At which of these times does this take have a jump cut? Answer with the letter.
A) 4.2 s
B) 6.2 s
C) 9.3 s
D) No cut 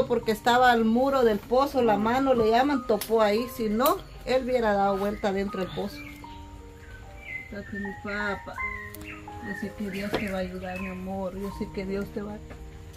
B